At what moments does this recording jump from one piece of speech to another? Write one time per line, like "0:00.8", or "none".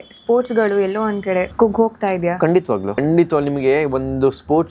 0:01.5
0:03.0